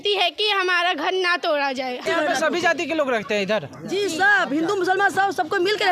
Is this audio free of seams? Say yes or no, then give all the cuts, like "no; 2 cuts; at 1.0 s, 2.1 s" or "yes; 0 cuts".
no; 1 cut; at 2.1 s